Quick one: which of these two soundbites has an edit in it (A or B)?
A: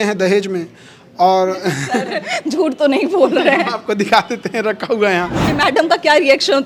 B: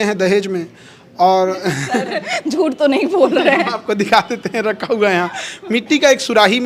A